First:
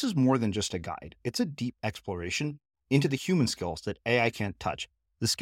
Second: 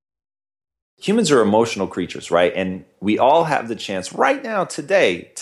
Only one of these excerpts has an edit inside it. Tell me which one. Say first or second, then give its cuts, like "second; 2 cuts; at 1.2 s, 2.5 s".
second; 1 cut; at 0.9 s